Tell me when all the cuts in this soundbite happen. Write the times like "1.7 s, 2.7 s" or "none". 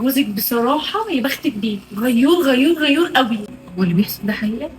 3.6 s